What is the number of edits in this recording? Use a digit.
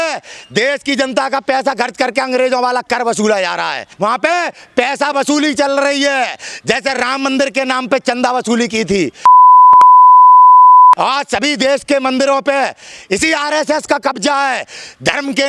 0